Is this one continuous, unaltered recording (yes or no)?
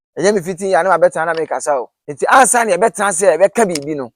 no